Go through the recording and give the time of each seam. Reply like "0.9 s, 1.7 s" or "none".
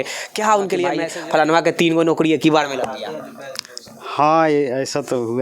1.1 s